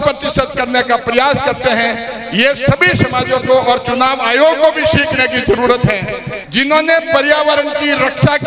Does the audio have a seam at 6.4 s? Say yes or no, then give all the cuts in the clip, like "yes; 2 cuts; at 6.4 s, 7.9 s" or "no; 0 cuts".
yes; 1 cut; at 6.4 s